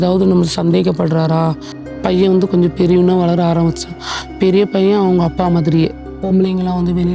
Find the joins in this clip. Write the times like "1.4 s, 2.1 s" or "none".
1.7 s, 6.1 s